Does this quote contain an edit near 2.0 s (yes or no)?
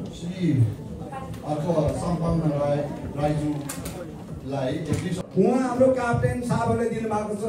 no